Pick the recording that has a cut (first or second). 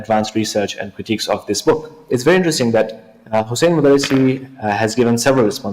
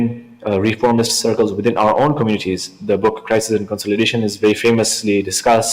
first